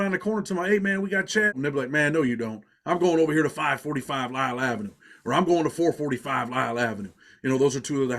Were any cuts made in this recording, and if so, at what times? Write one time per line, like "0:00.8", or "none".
0:01.5